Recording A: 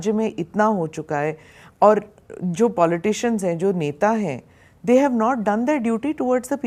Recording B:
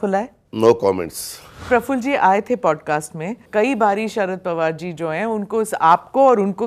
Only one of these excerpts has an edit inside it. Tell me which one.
B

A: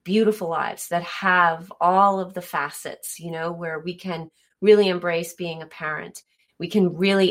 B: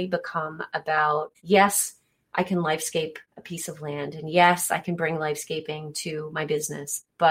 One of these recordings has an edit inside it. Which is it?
B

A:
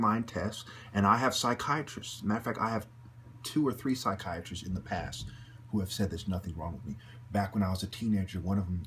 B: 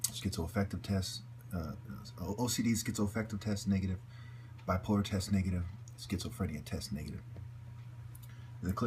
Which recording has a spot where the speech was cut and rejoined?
A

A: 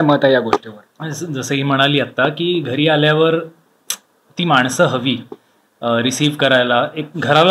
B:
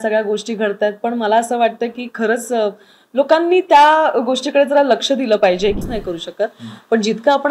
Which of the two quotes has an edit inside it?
B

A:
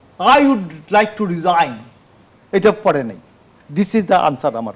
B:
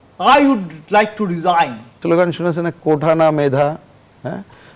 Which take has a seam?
B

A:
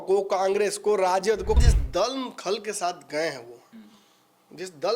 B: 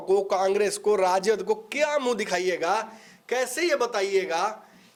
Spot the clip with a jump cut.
A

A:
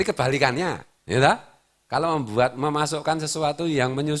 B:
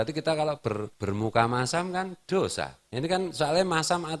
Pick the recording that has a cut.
B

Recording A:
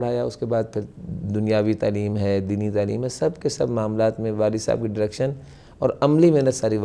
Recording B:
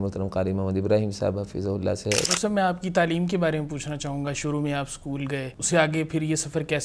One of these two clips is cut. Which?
B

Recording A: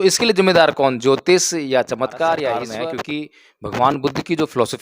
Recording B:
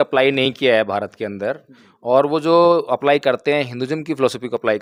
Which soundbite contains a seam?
A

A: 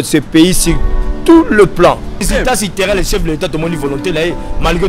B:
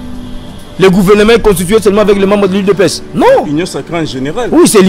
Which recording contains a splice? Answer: A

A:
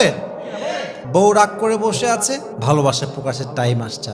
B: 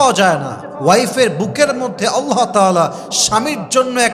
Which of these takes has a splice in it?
A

